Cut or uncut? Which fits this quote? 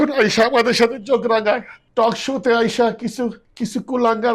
cut